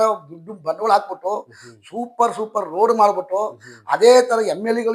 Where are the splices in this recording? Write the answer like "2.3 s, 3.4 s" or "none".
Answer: none